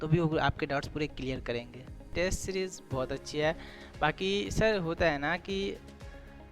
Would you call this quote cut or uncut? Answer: cut